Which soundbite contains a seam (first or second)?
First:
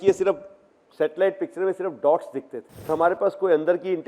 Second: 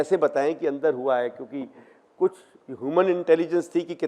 first